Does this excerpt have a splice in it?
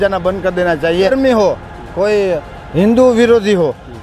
yes; 1 cut; at 1.1 s

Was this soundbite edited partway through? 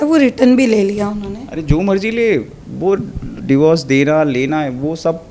no; 0 cuts

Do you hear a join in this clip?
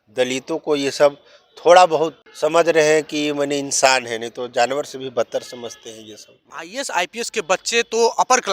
yes; 2 cuts; at 2.2 s, 6.5 s

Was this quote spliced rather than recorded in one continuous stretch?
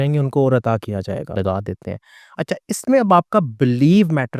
yes; 1 cut; at 1.3 s

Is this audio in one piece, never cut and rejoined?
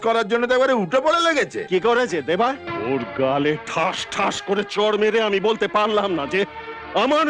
no; 1 cut; at 2.7 s

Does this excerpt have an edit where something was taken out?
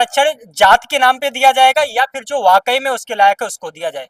no; 0 cuts

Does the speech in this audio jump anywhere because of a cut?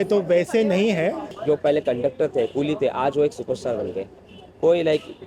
yes; 1 cut; at 1.3 s

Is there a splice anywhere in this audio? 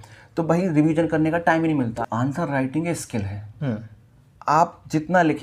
yes; 1 cut; at 1.9 s

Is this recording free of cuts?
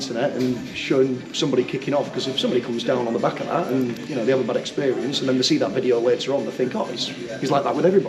yes; 0 cuts

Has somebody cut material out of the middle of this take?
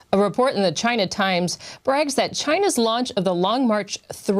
yes; 1 cut; at 2.1 s

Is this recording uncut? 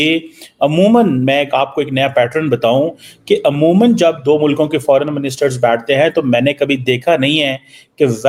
yes; 0 cuts

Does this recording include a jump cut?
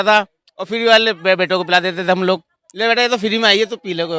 no; 0 cuts

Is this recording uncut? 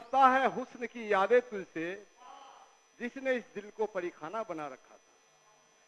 yes; 0 cuts

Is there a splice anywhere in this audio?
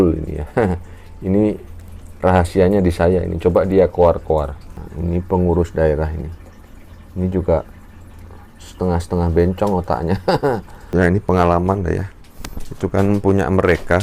yes; 2 cuts; at 4.6 s, 10.4 s

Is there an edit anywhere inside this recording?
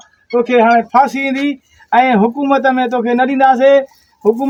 no; 0 cuts

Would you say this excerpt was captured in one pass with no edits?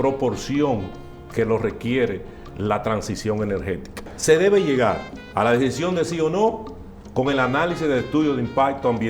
no; 1 cut; at 4.1 s

